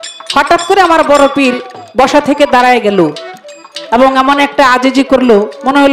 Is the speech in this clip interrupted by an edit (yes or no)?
no